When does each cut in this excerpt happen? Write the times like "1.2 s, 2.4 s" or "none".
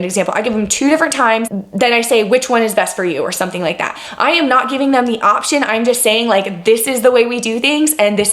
1.6 s